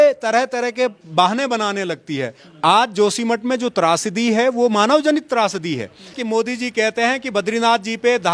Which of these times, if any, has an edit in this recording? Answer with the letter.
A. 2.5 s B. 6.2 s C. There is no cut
B